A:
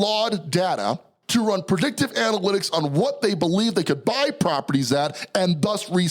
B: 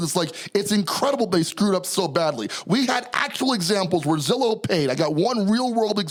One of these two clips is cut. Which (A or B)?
A